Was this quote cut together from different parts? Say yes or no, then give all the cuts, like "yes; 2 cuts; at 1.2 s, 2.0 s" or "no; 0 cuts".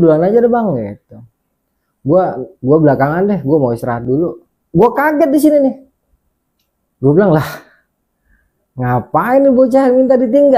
no; 0 cuts